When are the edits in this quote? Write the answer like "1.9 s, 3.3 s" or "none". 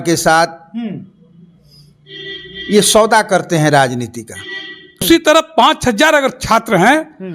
5.0 s